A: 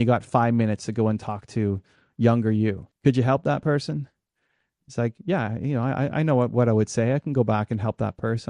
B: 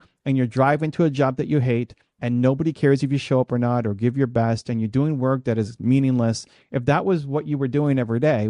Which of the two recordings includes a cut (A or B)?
A